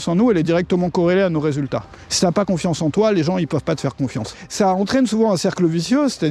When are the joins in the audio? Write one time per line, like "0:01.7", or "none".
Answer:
0:02.0
0:04.4